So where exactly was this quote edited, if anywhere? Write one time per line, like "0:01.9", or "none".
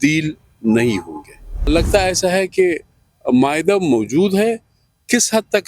0:01.7